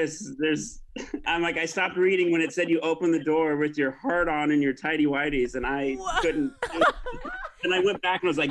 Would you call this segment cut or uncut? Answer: cut